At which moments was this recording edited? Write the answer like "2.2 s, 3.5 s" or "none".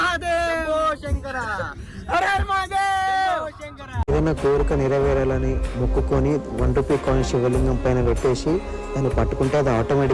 4.1 s